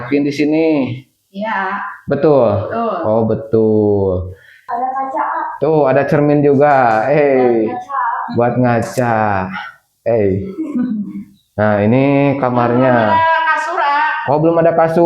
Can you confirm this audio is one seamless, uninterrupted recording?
no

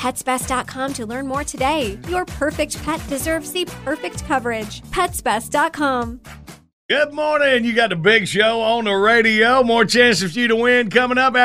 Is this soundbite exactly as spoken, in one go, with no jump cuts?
no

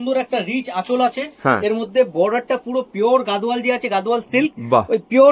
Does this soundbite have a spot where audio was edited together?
no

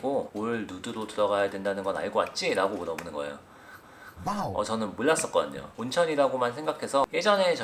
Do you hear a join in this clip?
no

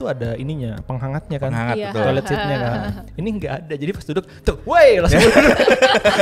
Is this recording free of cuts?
yes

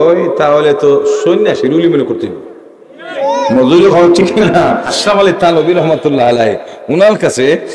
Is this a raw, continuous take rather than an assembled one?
no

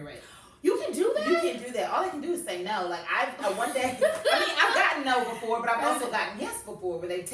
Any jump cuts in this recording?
no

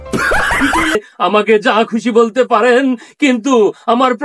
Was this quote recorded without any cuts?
no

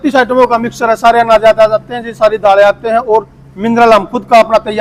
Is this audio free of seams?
yes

